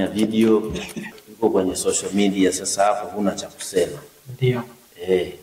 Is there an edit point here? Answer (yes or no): yes